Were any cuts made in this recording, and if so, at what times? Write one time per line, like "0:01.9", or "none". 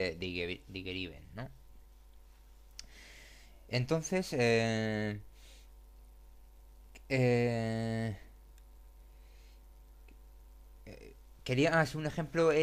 0:06.3

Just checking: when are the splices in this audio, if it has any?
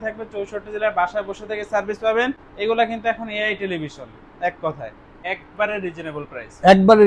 0:02.5
0:05.3

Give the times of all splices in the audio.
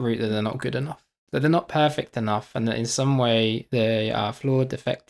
none

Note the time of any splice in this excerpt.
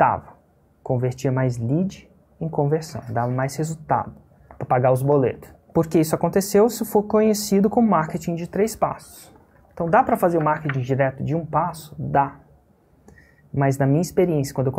0:05.6

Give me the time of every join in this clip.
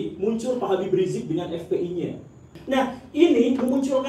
0:02.5

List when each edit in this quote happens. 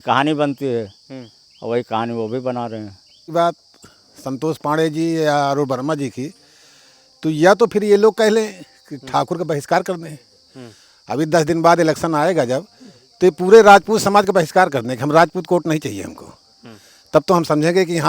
0:03.2

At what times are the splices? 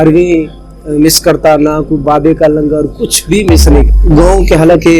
0:03.9

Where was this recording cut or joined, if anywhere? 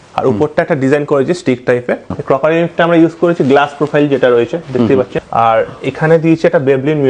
0:02.1
0:05.2

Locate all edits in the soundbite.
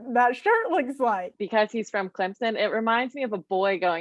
0:01.4

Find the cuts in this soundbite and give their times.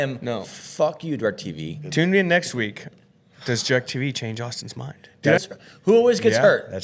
0:05.4

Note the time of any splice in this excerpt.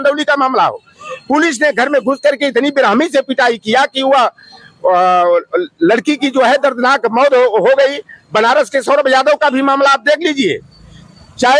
none

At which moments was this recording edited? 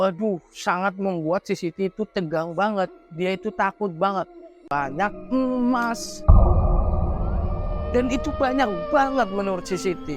0:04.6

